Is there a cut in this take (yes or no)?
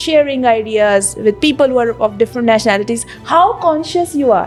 no